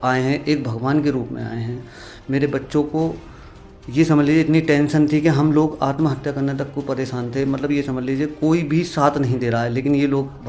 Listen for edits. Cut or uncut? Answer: uncut